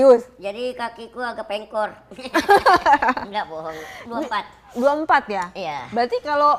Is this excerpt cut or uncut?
uncut